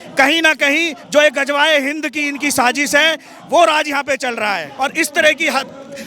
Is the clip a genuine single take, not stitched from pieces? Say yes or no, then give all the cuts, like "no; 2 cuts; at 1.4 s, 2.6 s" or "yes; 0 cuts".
no; 1 cut; at 4.7 s